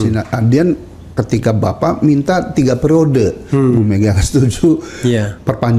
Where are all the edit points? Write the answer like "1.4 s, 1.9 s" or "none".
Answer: none

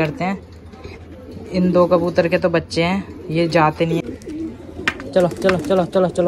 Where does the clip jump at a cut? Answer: 4.0 s

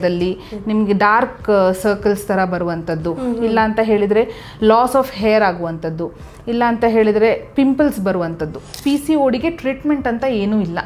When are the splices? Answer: 8.7 s

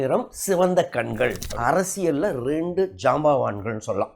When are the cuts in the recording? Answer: 1.4 s

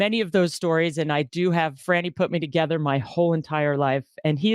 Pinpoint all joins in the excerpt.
1.8 s

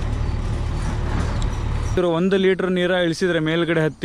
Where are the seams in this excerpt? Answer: 1.9 s

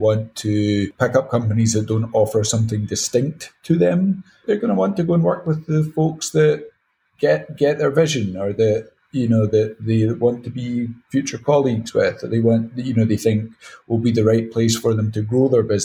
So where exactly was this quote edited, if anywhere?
0.9 s, 4.4 s

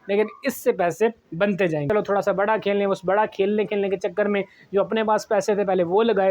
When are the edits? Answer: 1.9 s

